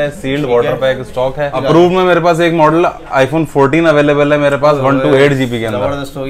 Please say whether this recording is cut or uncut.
cut